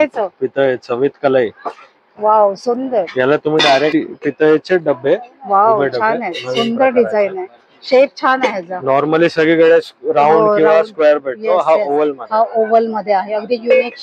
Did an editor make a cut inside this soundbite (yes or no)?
yes